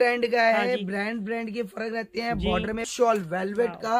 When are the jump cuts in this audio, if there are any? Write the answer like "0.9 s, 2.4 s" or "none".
2.9 s